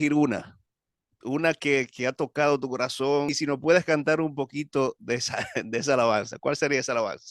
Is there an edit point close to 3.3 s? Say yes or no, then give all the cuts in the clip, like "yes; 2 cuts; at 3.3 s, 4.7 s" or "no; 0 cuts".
yes; 1 cut; at 3.3 s